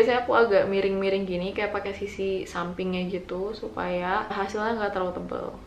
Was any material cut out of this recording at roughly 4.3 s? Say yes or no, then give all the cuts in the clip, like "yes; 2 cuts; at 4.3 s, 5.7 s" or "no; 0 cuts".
yes; 1 cut; at 4.3 s